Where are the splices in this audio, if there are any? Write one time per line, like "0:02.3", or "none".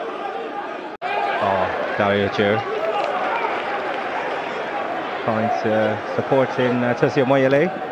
none

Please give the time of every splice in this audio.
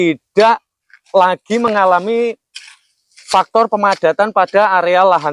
none

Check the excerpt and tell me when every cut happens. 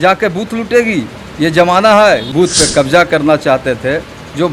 0:02.3

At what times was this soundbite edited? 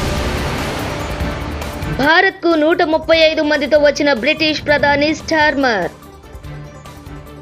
0:01.8

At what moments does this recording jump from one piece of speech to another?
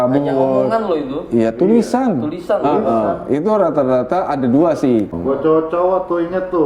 0:05.1

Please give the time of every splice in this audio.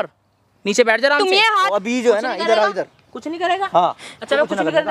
0:01.7

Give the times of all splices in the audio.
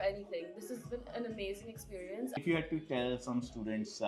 0:02.4

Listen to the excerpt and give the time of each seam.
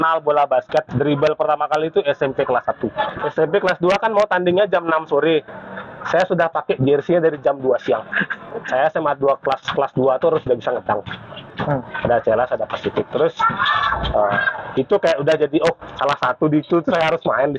0:03.2
0:08.7
0:11.5

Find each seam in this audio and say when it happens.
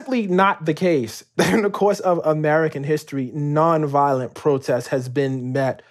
0:01.2

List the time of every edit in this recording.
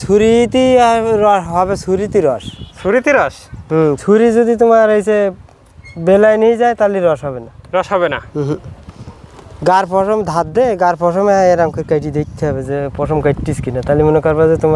none

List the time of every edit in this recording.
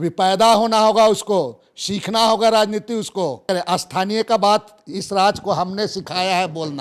0:03.4

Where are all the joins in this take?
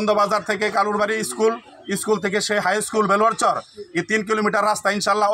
none

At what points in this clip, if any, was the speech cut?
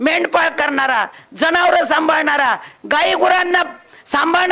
none

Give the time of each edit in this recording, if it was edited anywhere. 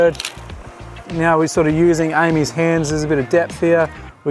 0:01.1

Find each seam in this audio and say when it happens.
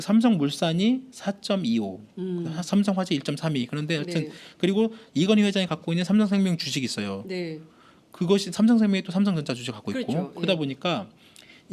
0:02.0

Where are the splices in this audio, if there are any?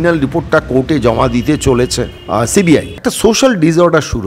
0:02.2
0:02.9

